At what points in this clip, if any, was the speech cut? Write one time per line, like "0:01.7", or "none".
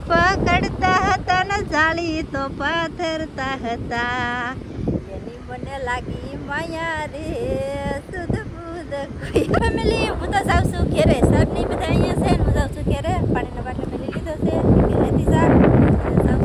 none